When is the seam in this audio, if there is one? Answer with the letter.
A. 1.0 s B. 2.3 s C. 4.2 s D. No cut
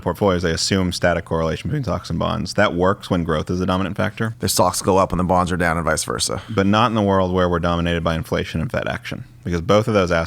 C